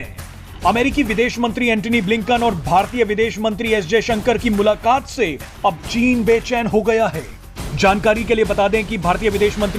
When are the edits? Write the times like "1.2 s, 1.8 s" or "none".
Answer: none